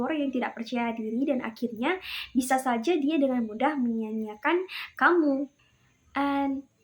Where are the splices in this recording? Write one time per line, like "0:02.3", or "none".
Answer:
none